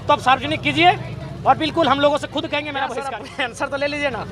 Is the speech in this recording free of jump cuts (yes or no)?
no